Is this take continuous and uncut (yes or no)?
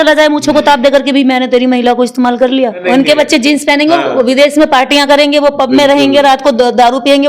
no